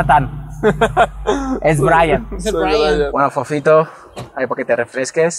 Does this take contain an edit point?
yes; 1 cut; at 3.1 s

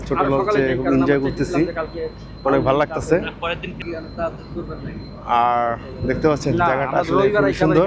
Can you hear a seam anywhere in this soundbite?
no; 0 cuts

